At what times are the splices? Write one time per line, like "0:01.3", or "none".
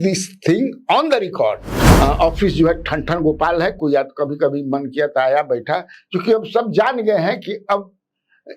0:01.8